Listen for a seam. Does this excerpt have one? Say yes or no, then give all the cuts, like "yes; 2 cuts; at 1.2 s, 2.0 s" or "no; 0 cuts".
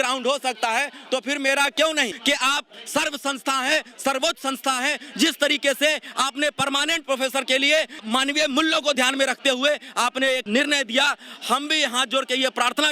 yes; 3 cuts; at 2.1 s, 8.0 s, 10.4 s